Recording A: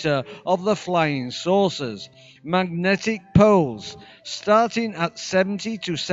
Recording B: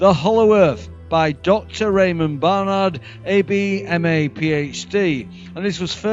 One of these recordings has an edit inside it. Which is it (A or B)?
B